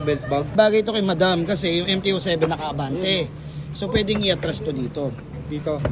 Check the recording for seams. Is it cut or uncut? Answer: uncut